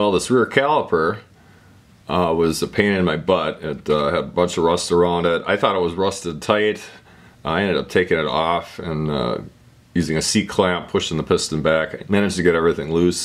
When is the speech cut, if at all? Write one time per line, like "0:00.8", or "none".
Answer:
none